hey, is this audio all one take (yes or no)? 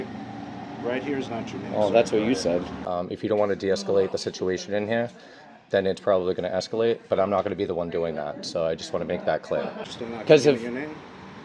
no